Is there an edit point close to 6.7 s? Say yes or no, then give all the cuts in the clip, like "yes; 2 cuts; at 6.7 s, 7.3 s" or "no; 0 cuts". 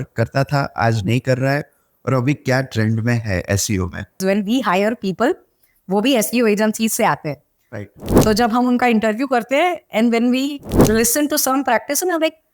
no; 1 cut; at 4.2 s